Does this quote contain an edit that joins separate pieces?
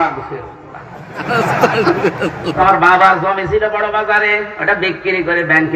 yes; 1 cut; at 2.6 s

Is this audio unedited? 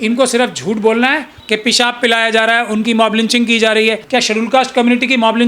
no; 2 cuts; at 1.4 s, 4.0 s

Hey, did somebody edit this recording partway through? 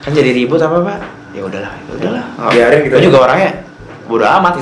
no; 0 cuts

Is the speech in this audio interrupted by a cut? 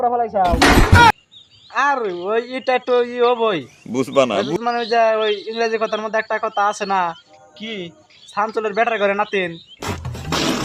no; 0 cuts

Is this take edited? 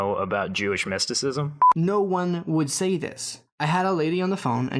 yes; 1 cut; at 1.6 s

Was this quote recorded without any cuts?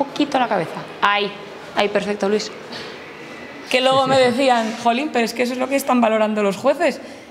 no; 1 cut; at 3.6 s

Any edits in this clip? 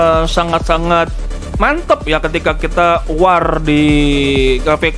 no; 0 cuts

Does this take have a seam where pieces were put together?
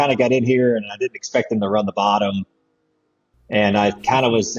no; 0 cuts

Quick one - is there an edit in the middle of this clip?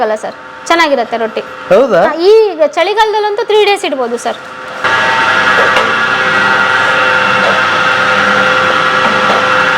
yes; 1 cut; at 4.8 s

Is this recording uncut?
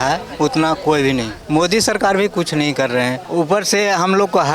no; 2 cuts; at 1.3 s, 3.2 s

